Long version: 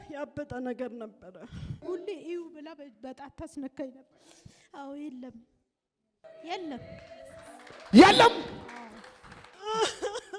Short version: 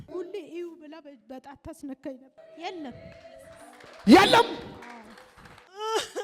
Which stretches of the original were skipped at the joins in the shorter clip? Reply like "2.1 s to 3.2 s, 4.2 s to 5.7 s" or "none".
4.1 s to 6.2 s